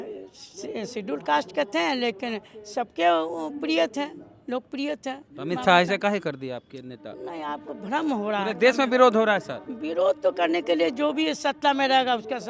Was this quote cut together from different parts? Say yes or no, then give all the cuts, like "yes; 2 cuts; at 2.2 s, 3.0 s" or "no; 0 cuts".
no; 0 cuts